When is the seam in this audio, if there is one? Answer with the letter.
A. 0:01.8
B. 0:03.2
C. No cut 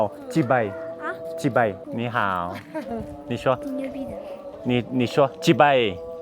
A